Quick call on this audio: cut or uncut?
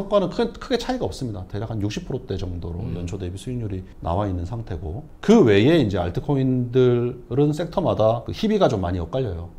uncut